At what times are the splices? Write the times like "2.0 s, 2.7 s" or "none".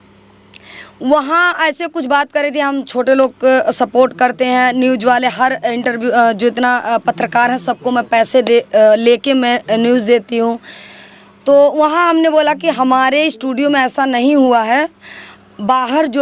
none